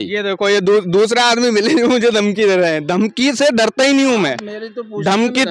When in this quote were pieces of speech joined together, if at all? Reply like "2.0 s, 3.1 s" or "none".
none